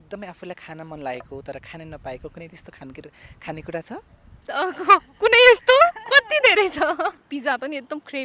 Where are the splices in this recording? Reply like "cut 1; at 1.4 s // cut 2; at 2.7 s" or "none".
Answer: cut 1; at 7.2 s